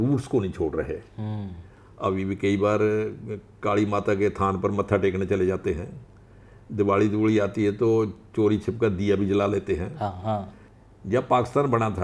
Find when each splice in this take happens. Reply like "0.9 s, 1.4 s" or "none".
10.6 s